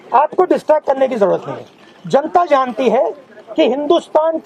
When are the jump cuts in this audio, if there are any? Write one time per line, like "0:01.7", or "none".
none